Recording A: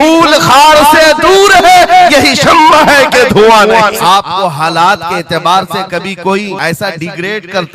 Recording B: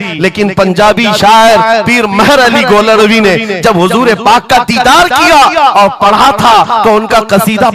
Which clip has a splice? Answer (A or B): A